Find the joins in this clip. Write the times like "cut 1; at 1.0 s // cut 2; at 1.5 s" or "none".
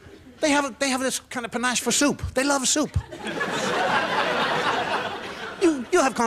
cut 1; at 4.8 s

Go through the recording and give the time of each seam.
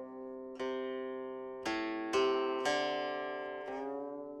none

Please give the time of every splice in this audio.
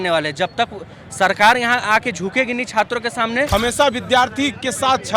cut 1; at 3.5 s

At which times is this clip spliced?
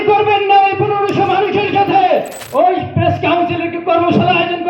cut 1; at 2.4 s

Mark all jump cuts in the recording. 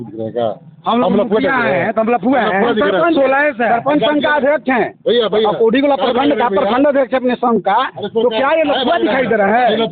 none

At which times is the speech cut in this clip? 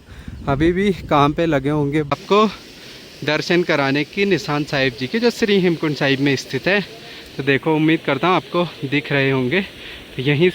cut 1; at 2.1 s

